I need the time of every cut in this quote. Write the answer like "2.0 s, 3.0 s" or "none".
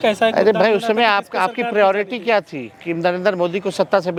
none